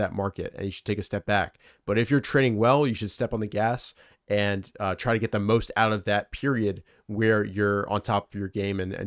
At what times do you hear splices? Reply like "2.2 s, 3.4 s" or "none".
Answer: none